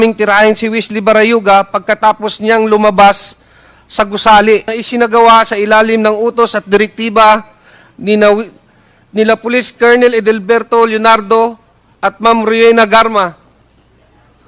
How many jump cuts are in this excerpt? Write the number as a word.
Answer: one